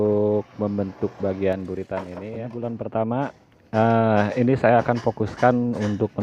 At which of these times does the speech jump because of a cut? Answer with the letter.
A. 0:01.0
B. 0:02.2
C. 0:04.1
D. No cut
B